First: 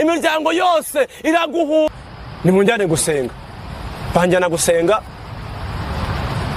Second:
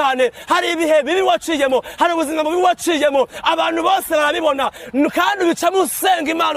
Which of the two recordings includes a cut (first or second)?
first